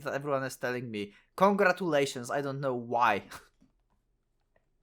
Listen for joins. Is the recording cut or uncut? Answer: uncut